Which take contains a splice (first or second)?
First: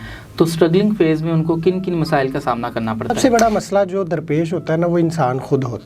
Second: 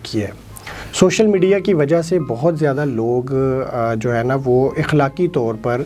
first